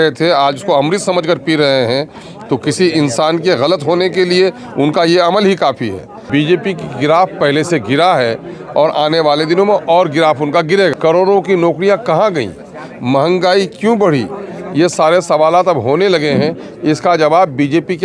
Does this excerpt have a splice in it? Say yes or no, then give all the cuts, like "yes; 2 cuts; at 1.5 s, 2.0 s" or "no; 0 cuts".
yes; 2 cuts; at 6.3 s, 10.9 s